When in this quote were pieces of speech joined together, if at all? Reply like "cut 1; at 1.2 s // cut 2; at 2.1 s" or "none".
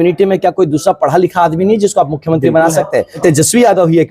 cut 1; at 3.2 s